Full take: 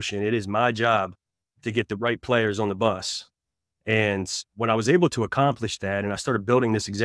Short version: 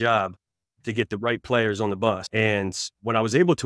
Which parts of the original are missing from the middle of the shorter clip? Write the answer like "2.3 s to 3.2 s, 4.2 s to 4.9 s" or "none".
3.0 s to 3.8 s